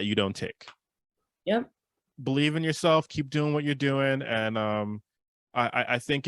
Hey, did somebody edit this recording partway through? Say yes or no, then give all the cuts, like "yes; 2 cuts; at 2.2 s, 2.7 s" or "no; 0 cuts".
no; 0 cuts